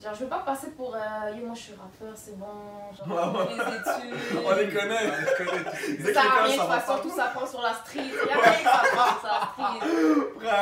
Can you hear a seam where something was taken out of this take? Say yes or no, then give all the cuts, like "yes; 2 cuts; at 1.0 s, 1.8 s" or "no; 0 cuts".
no; 0 cuts